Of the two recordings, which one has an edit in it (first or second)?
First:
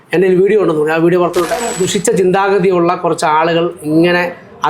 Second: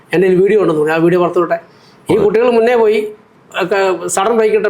first